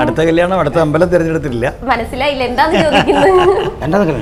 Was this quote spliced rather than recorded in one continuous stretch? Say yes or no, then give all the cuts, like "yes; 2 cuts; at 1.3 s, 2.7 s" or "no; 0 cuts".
no; 0 cuts